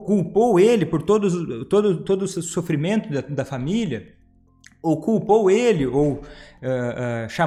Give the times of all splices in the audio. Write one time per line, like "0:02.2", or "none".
none